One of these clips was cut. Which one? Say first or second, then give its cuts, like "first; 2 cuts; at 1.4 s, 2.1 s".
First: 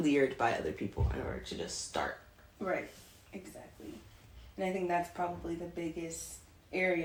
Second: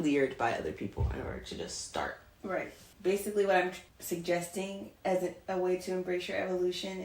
second; 2 cuts; at 2.6 s, 3.9 s